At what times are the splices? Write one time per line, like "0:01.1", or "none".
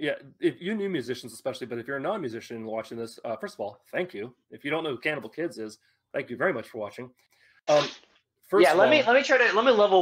0:07.6